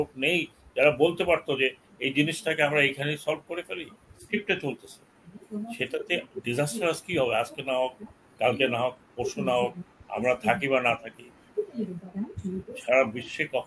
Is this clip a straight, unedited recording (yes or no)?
no